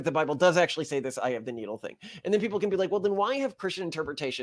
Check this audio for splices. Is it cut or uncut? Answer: uncut